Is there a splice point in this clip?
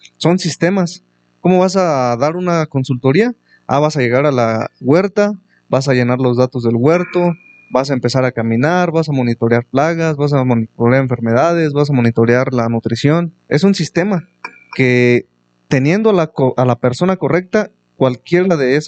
yes; 1 cut; at 13.4 s

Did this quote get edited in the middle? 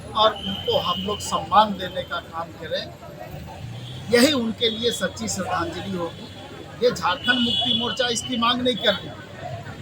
no; 0 cuts

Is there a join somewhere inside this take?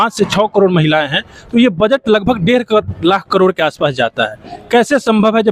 no; 0 cuts

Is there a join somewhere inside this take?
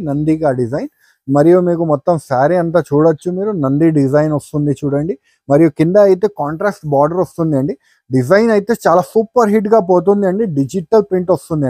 no; 0 cuts

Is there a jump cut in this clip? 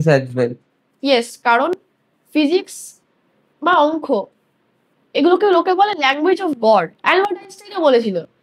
yes; 2 cuts; at 1.4 s, 6.9 s

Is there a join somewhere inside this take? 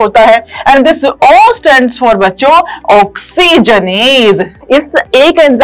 yes; 1 cut; at 4.5 s

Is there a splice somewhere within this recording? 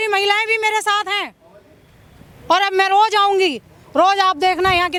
no; 0 cuts

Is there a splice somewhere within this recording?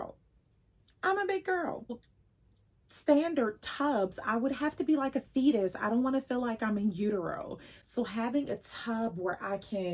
no; 0 cuts

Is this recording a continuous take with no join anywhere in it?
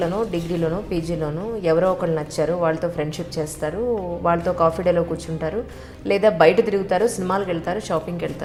yes; 0 cuts

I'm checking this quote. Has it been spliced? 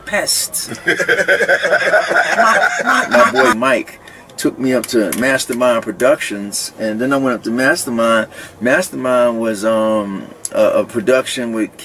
yes; 1 cut; at 3.1 s

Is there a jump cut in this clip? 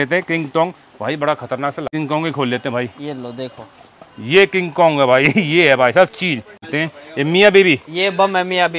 yes; 2 cuts; at 1.9 s, 6.6 s

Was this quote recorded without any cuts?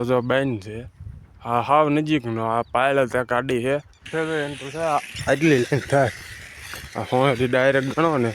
no; 1 cut; at 4.0 s

